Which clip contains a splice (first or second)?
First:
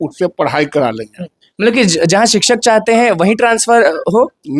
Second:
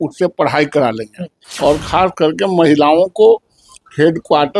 second